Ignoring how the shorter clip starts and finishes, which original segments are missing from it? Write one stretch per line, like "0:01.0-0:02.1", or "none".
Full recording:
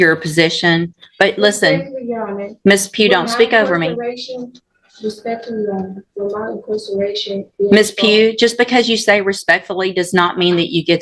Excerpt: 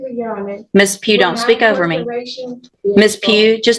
0:04.6-0:07.4